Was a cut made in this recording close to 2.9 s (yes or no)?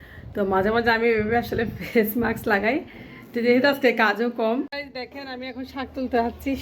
no